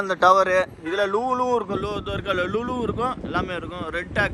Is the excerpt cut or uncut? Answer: uncut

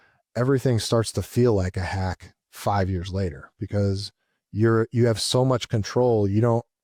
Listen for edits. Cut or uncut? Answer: uncut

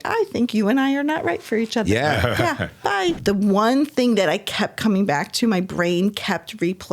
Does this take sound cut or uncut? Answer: cut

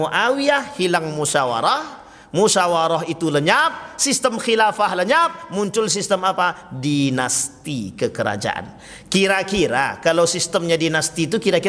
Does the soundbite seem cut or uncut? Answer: uncut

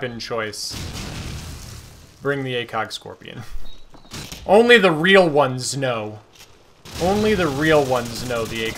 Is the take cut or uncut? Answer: cut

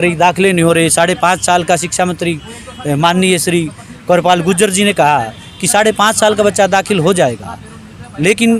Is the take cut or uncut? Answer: uncut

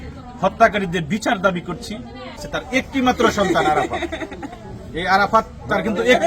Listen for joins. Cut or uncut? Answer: cut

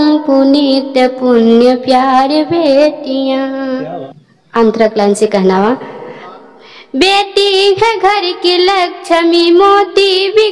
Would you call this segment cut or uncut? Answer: uncut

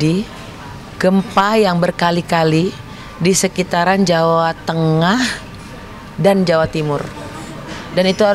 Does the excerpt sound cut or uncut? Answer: uncut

